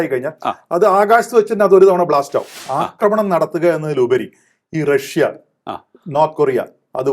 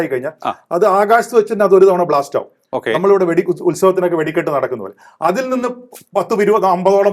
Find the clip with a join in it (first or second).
first